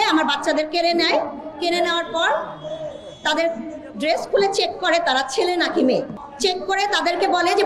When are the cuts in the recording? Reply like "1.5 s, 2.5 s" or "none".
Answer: 6.2 s